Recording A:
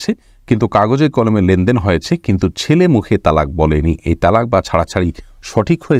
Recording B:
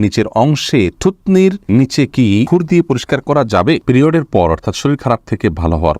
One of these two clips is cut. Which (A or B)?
B